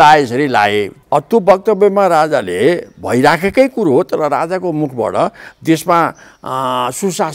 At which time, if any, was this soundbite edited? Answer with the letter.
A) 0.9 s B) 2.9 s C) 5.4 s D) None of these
A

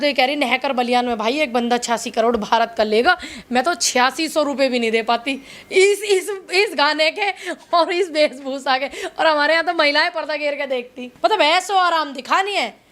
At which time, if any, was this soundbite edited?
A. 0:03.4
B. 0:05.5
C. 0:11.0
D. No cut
C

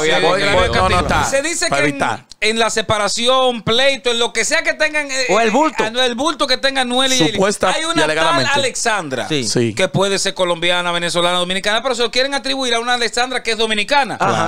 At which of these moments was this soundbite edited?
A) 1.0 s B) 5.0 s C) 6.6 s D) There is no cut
A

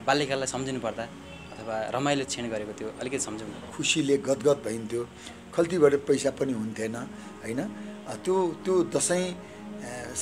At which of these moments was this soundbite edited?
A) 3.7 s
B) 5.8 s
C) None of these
A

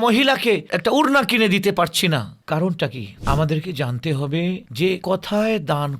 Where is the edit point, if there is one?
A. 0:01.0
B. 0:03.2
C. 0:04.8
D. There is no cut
B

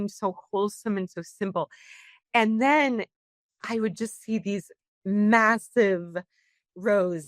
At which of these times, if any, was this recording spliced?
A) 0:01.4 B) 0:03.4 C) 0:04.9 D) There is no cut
C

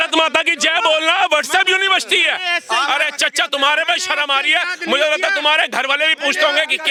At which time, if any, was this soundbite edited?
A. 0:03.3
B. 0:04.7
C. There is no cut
C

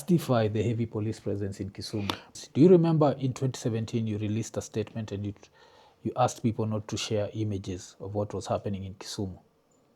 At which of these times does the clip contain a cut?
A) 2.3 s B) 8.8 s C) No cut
A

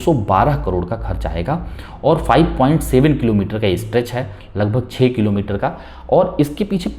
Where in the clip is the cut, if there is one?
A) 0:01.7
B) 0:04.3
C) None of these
C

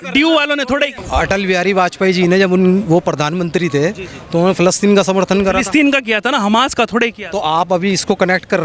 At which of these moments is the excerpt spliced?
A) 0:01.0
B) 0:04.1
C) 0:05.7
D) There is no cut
A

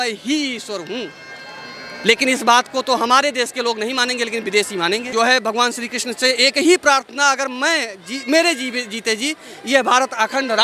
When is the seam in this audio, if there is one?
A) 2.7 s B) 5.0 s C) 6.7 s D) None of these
B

